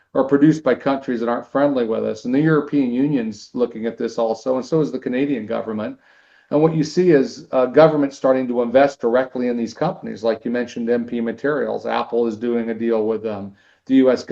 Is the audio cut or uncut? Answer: uncut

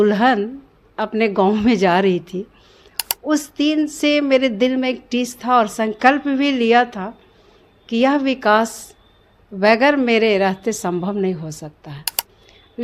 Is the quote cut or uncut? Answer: uncut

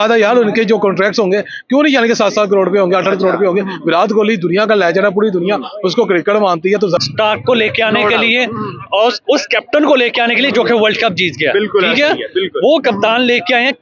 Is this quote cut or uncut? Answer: cut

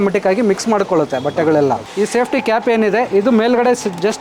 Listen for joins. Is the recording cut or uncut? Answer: cut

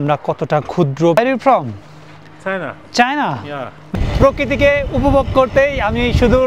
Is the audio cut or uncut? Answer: cut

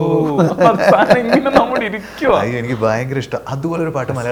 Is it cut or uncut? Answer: uncut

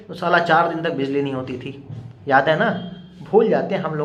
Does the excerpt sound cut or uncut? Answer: uncut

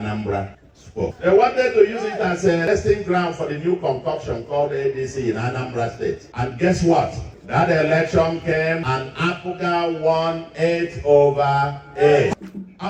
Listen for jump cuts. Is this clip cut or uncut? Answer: uncut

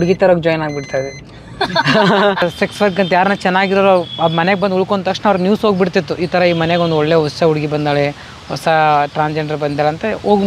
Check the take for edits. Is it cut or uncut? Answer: cut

